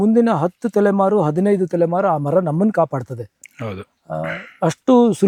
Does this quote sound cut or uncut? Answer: uncut